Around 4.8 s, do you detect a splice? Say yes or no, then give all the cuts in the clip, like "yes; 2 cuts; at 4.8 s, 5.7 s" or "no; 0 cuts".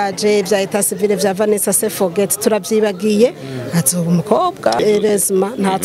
yes; 1 cut; at 4.8 s